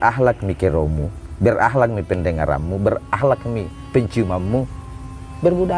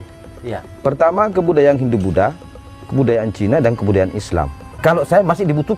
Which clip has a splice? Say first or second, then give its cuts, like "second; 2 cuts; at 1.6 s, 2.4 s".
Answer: second; 1 cut; at 4.6 s